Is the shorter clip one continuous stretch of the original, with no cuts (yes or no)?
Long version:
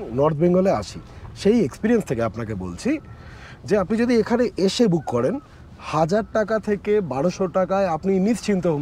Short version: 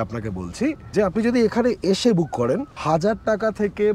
no